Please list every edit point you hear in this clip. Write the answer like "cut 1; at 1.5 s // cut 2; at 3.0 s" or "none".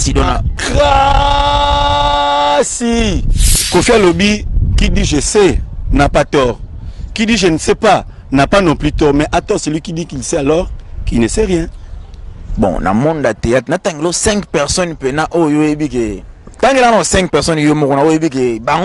cut 1; at 3.5 s